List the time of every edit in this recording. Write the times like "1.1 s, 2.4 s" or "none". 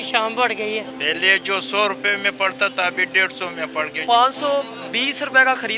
0.9 s, 4.0 s